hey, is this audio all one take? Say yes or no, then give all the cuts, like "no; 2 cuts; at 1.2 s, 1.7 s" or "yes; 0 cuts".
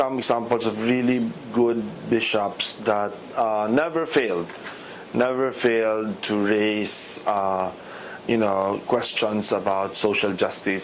no; 1 cut; at 5.3 s